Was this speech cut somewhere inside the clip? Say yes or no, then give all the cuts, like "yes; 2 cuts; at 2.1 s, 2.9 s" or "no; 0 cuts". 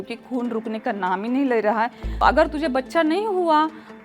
yes; 1 cut; at 2.0 s